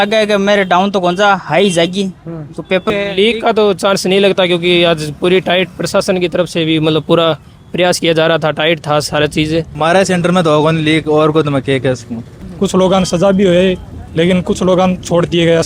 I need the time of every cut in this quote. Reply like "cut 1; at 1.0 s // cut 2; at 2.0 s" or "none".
cut 1; at 2.9 s // cut 2; at 9.7 s // cut 3; at 12.4 s